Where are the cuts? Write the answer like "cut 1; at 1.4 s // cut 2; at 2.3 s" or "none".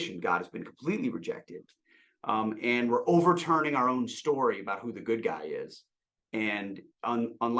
none